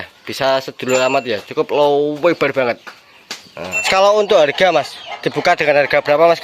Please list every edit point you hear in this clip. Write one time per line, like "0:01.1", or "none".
0:03.9